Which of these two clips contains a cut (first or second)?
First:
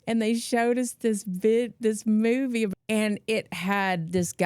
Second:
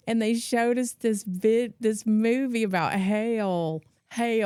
first